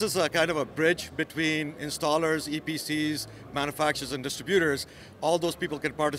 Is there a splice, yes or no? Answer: no